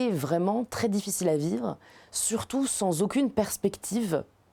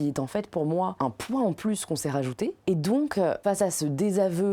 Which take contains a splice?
second; 3 cuts; at 1.0 s, 2.6 s, 3.4 s

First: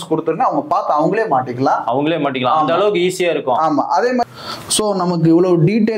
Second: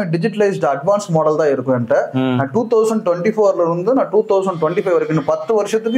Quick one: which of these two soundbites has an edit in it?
first; 1 cut; at 4.2 s

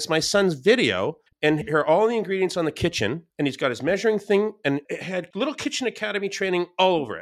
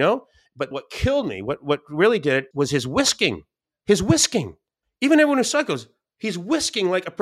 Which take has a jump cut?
first; 1 cut; at 1.2 s

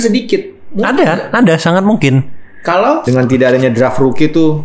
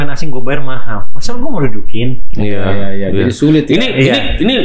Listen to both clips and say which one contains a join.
first; 1 cut; at 3.0 s

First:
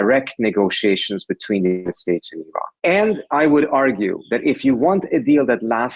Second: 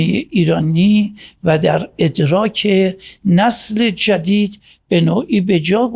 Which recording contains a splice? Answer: first; 1 cut; at 2.7 s

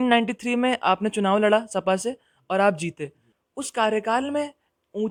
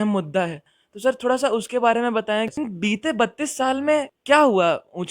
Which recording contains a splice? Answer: second; 1 cut; at 2.5 s

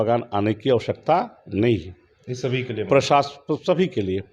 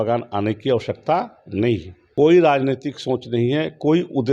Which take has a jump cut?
second; 1 cut; at 2.0 s

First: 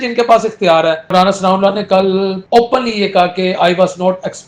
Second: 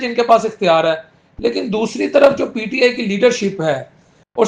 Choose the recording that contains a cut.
first; 2 cuts; at 1.0 s, 2.4 s

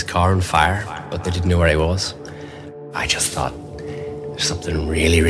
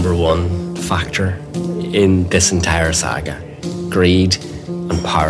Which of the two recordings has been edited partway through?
first; 2 cuts; at 1.0 s, 2.8 s

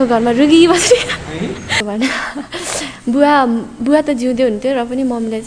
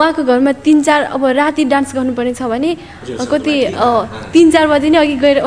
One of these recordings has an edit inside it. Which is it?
first; 1 cut; at 1.7 s

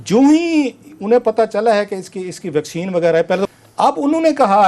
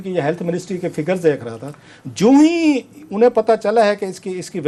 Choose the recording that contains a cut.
first; 1 cut; at 3.5 s

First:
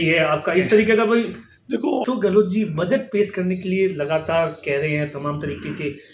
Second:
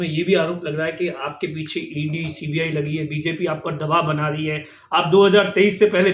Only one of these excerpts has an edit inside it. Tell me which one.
first; 1 cut; at 2.0 s

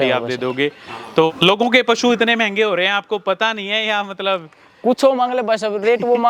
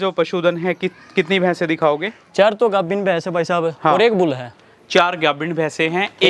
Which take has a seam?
first; 1 cut; at 1.3 s

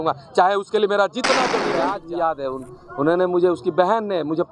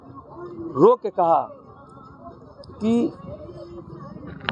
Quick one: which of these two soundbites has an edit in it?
first; 1 cut; at 1.8 s

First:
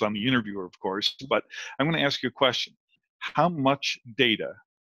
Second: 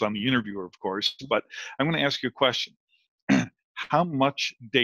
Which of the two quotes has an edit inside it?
first; 1 cut; at 3.1 s

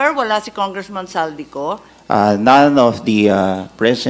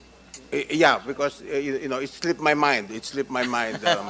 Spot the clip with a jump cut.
first; 1 cut; at 1.9 s

